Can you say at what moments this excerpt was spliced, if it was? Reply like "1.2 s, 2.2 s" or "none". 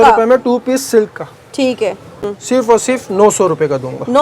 2.3 s